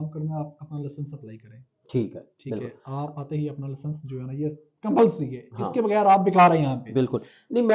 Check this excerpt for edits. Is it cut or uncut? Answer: uncut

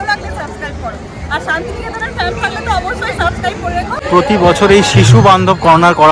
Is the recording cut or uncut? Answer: cut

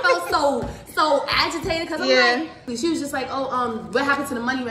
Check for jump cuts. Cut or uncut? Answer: cut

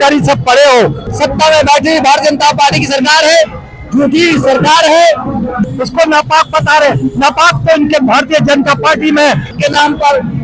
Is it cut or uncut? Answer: cut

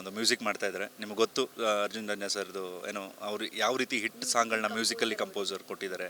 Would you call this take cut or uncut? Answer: uncut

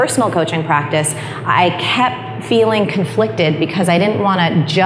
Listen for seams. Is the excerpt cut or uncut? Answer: uncut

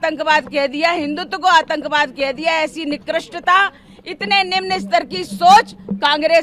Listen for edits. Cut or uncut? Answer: uncut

